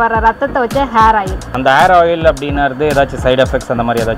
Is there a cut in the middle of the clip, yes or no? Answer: yes